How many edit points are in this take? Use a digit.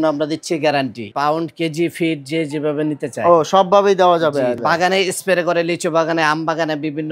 2